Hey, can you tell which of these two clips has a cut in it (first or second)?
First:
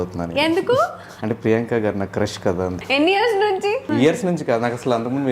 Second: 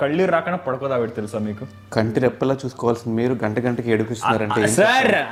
first